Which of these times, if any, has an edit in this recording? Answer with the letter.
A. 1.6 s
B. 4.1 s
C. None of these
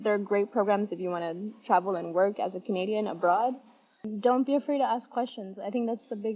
B